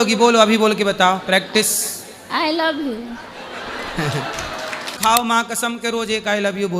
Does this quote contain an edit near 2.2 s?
no; 1 cut; at 5.0 s

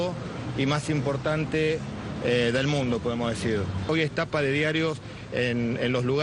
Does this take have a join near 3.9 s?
yes; 1 cut; at 3.9 s

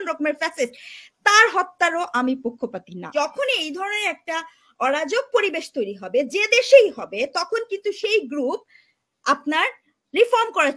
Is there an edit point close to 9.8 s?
no; 1 cut; at 3.1 s

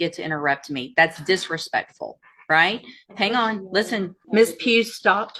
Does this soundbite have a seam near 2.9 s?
no; 1 cut; at 4.2 s

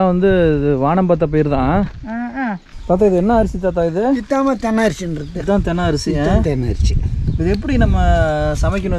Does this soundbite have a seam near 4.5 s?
no; 1 cut; at 2.6 s

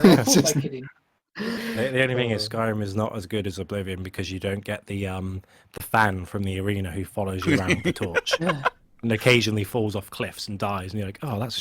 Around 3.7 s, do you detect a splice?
no; 1 cut; at 1.6 s

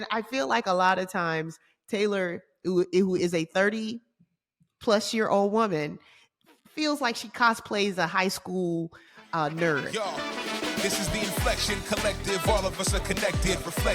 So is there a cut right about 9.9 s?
yes; 1 cut; at 9.9 s

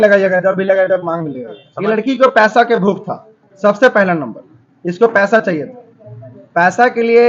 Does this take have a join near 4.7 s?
no; 1 cut; at 1.7 s

